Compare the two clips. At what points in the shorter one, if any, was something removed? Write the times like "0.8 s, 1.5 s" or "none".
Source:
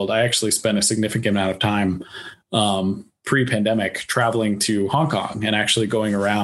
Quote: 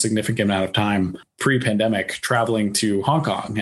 1.3 s